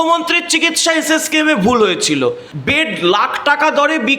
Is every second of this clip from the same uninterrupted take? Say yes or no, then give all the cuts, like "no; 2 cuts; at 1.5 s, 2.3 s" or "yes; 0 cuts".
no; 1 cut; at 2.5 s